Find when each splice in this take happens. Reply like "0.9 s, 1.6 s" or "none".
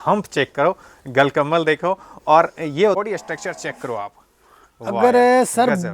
3.0 s